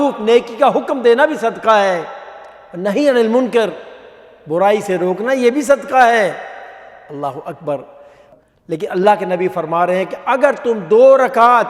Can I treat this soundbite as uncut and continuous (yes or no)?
no